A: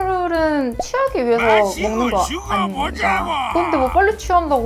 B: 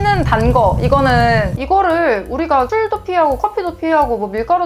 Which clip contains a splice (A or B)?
B